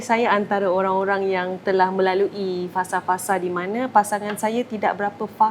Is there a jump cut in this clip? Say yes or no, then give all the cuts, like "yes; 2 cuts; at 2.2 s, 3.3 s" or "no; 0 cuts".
no; 0 cuts